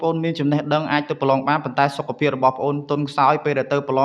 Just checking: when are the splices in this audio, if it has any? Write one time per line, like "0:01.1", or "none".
none